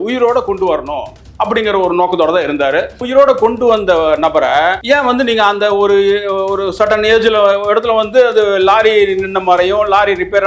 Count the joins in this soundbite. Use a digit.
2